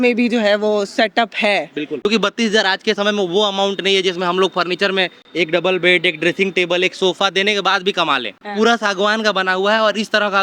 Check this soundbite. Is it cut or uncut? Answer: cut